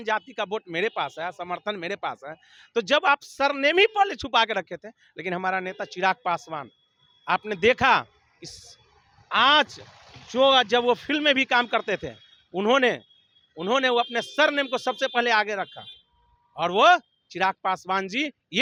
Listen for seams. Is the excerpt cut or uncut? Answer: uncut